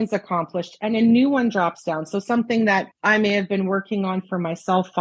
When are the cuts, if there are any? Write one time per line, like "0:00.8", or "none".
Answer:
0:02.9